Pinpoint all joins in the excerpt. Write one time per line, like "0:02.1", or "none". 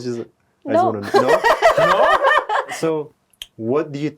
0:02.7